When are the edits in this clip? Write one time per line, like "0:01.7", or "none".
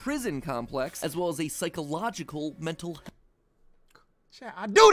none